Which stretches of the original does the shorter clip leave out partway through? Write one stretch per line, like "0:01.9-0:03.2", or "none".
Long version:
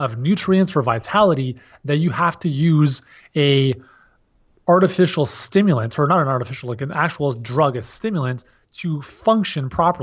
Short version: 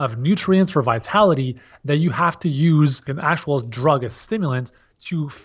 0:03.1-0:06.8